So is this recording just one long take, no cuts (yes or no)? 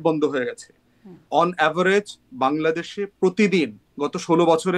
yes